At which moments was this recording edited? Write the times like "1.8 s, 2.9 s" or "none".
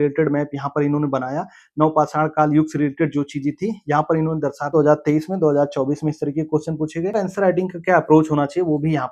4.7 s, 7.2 s

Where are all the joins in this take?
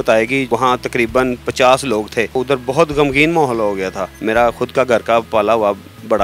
2.3 s, 4.1 s

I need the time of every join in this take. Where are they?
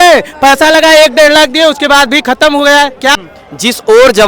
3.1 s

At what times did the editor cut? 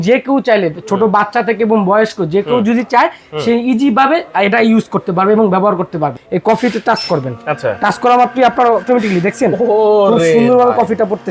6.2 s

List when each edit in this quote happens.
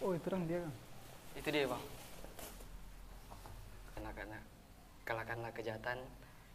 4.0 s

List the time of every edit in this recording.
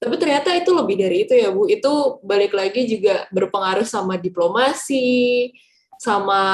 none

